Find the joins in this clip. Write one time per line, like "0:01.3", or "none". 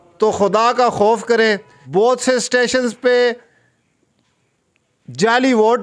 0:01.7